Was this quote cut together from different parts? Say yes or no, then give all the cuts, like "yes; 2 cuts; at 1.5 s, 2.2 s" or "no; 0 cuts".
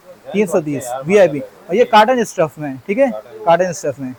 no; 0 cuts